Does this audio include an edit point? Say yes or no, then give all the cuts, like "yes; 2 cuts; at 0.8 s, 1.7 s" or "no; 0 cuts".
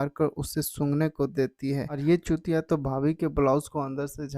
yes; 1 cut; at 2.0 s